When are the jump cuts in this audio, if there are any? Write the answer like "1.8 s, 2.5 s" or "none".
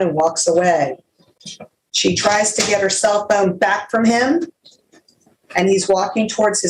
none